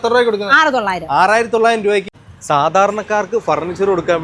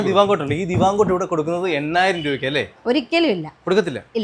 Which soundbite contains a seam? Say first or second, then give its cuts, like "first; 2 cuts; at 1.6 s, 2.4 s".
first; 1 cut; at 2.5 s